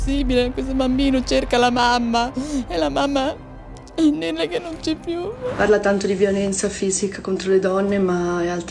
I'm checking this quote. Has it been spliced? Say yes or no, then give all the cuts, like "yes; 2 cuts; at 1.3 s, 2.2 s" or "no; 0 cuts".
yes; 1 cut; at 5.5 s